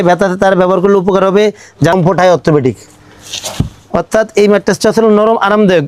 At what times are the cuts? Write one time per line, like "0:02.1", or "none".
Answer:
0:01.9